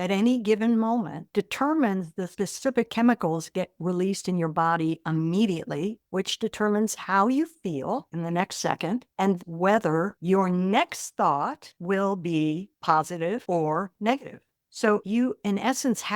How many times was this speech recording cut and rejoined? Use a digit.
3